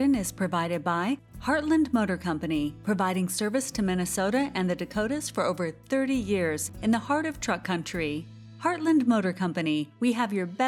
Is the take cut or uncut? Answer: uncut